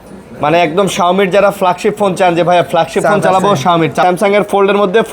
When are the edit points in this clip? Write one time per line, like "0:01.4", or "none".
0:04.0

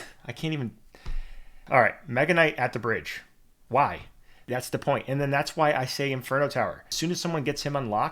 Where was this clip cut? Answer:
0:01.6
0:04.5
0:06.9

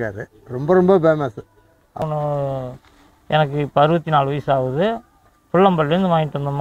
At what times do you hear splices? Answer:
0:02.0

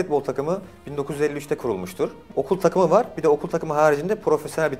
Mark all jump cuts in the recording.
0:02.2

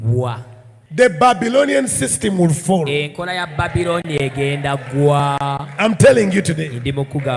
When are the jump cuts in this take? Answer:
none

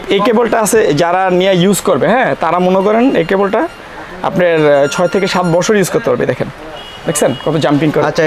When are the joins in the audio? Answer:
none

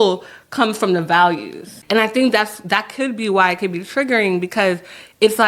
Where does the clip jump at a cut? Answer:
0:01.7

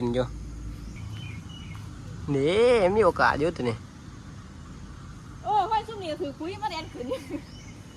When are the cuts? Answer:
0:01.0

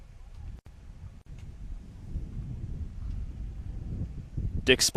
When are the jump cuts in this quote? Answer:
none

